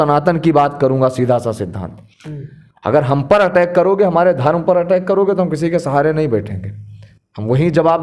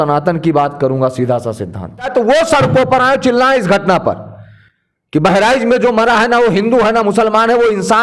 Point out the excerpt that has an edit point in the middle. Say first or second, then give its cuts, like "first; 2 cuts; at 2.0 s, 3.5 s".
second; 1 cut; at 2.1 s